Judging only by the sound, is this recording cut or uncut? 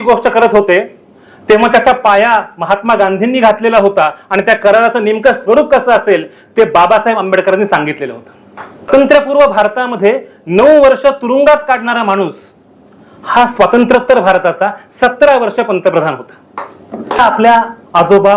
cut